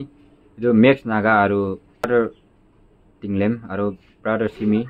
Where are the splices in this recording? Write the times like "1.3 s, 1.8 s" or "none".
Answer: 2.0 s